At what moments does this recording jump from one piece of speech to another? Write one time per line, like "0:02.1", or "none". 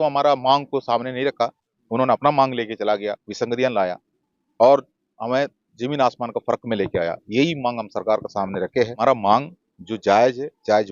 0:08.9